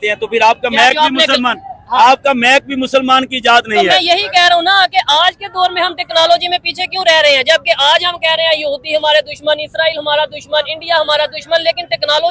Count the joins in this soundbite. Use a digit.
0